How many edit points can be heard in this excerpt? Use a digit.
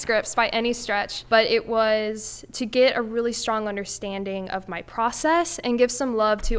1